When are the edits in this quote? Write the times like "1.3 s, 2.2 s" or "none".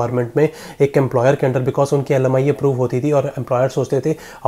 none